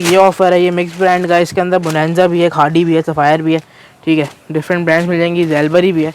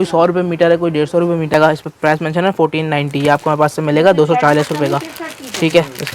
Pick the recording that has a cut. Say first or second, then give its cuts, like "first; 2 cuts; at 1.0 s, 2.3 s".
second; 1 cut; at 1.5 s